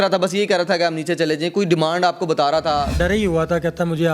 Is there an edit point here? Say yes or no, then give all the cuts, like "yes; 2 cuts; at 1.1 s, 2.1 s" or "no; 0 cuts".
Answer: yes; 1 cut; at 3.0 s